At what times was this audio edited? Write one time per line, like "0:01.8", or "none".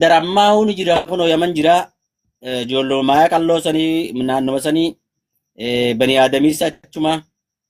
none